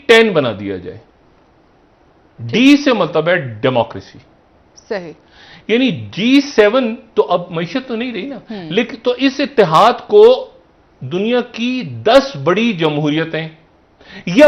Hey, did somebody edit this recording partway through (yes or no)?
no